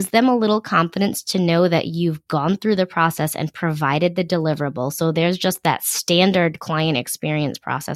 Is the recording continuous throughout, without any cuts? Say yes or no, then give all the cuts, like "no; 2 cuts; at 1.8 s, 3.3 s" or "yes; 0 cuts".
yes; 0 cuts